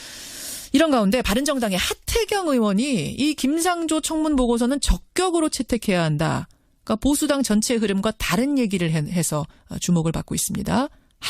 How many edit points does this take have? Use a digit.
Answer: 1